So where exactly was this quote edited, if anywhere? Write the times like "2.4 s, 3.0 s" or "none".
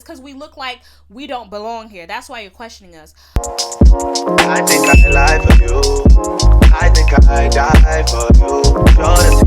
3.3 s

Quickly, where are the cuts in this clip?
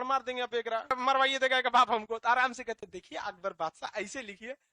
0.9 s

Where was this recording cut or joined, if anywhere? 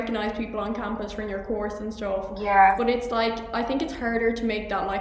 none

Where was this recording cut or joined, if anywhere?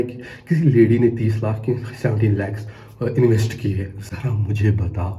none

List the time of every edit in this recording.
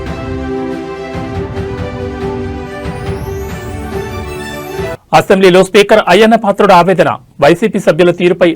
4.2 s

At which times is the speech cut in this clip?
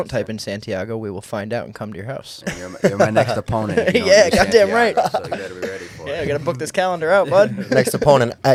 none

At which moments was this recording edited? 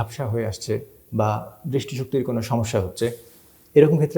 none

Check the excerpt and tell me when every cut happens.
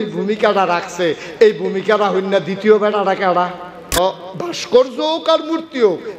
4.0 s

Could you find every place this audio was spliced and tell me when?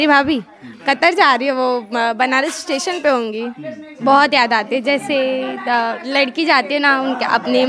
3.9 s

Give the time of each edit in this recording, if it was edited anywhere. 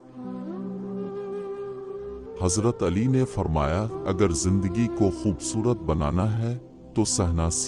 2.1 s

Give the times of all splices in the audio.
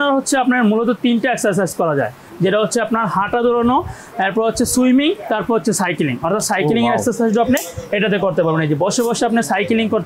none

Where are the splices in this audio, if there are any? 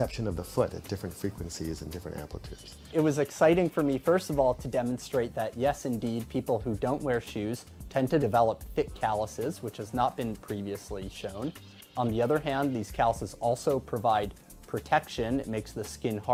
none

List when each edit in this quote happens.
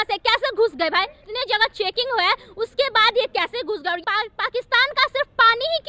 1.2 s, 4.0 s

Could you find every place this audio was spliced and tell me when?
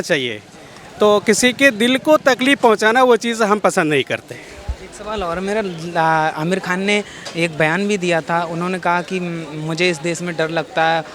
none

